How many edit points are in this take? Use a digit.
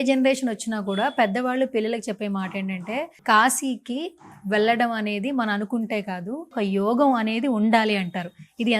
2